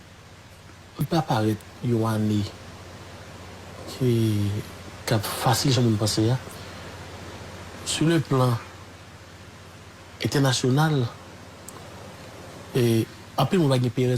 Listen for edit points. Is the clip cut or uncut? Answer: cut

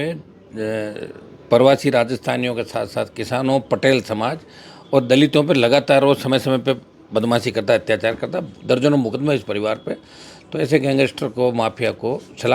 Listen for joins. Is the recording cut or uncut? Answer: uncut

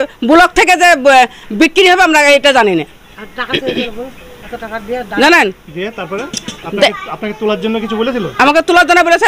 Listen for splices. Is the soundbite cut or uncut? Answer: uncut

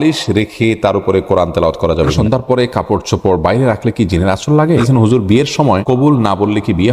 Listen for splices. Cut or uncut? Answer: cut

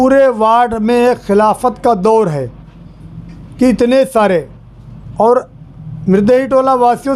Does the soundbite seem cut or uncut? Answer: uncut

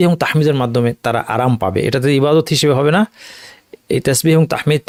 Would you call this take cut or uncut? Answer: uncut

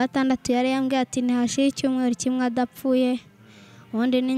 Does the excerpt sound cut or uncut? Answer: uncut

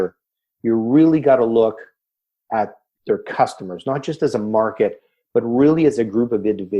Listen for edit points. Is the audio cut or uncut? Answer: cut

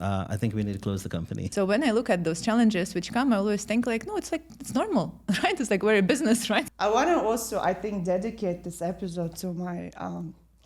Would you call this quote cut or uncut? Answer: cut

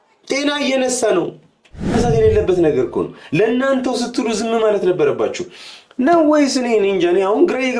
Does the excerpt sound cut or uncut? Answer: cut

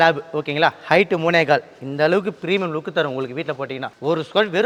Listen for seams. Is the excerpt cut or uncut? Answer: uncut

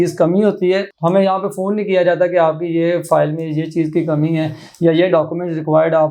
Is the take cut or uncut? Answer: uncut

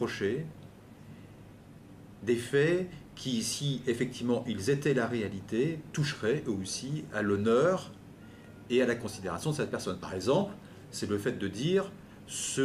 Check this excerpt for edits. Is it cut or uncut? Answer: cut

